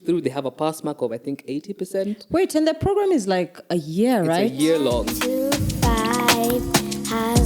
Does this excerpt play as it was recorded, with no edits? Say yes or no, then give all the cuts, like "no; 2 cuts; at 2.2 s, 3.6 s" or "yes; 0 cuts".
no; 1 cut; at 5.1 s